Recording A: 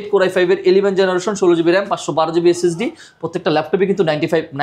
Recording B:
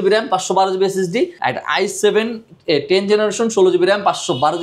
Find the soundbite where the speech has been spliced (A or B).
B